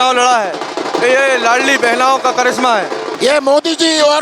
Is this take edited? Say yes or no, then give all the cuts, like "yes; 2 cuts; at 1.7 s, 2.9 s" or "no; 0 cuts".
yes; 1 cut; at 3.1 s